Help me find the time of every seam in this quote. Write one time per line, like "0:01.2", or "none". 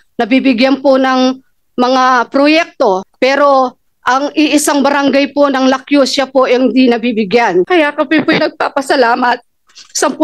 0:03.1
0:07.7